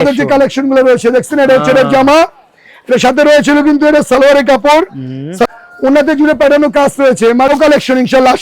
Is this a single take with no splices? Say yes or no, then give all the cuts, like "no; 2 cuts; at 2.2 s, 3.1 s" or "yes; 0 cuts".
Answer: no; 2 cuts; at 5.5 s, 7.5 s